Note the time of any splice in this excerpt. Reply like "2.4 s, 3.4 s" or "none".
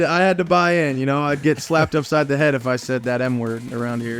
none